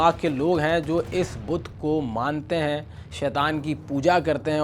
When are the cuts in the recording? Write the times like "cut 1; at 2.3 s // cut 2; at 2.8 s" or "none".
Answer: none

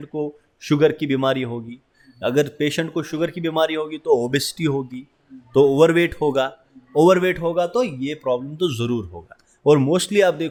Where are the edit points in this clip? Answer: none

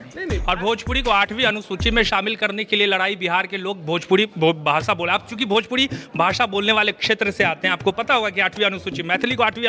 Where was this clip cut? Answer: none

